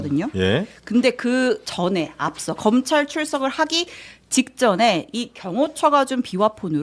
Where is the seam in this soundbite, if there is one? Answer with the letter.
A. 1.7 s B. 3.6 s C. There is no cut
A